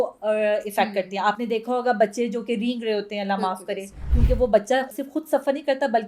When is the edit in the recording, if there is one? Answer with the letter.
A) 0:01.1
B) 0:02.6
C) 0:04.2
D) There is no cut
C